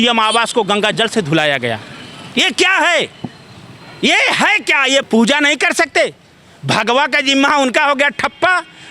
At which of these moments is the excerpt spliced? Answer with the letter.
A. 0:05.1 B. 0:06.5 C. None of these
A